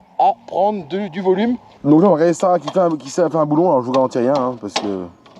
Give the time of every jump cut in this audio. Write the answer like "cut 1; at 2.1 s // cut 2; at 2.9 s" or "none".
cut 1; at 1.7 s